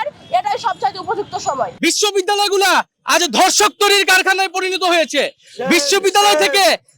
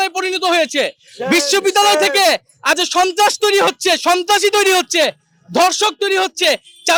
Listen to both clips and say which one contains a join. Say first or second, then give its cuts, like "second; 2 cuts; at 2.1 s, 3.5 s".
first; 1 cut; at 1.7 s